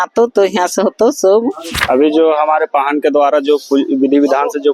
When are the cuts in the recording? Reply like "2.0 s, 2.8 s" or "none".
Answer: 1.7 s